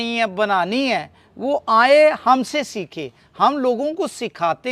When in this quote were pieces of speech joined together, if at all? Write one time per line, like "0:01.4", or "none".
none